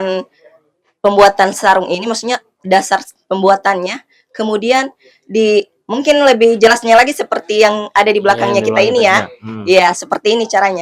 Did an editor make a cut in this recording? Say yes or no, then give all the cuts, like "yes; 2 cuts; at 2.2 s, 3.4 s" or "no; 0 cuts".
no; 0 cuts